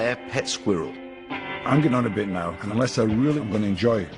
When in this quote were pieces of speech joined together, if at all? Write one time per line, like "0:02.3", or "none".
0:01.4
0:02.6